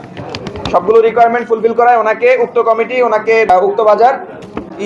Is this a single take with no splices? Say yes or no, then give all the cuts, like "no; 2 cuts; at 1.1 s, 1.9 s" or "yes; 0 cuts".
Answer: no; 1 cut; at 3.5 s